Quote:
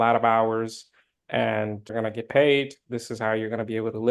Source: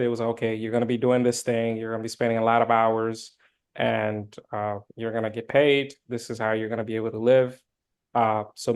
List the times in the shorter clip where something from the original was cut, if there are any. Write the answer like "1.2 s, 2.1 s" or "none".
1.9 s